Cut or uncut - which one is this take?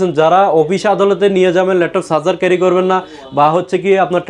uncut